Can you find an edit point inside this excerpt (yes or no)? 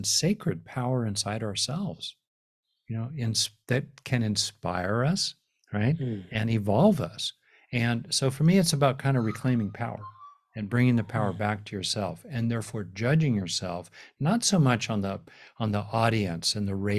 no